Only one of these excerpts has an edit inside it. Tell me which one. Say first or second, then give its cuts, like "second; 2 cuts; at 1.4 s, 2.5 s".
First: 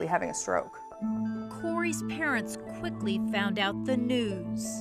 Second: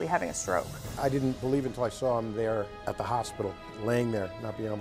second; 2 cuts; at 1.0 s, 3.2 s